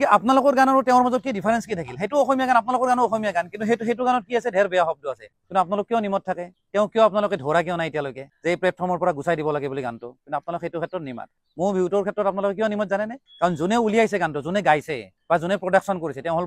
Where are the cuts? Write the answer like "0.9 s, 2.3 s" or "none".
11.3 s